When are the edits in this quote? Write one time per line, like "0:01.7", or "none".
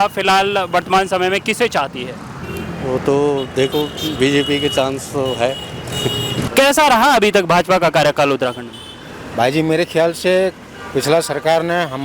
0:06.3